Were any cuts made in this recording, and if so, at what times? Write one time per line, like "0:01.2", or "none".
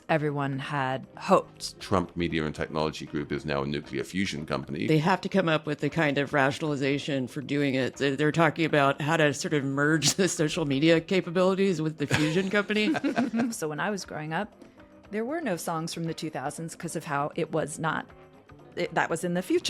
0:01.1
0:01.8
0:04.8
0:07.9
0:13.5